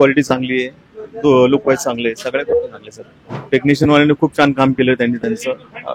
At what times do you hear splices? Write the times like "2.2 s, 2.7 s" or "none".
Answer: 3.4 s